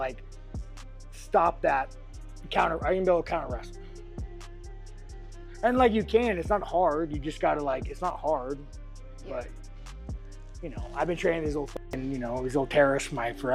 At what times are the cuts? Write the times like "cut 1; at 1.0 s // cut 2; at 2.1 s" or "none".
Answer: none